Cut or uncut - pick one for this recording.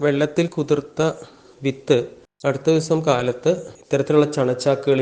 cut